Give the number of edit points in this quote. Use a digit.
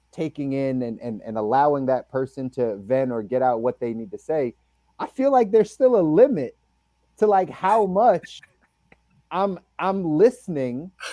0